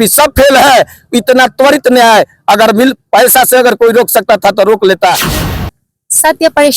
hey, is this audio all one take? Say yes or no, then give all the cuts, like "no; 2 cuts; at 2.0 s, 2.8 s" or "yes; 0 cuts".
no; 1 cut; at 5.4 s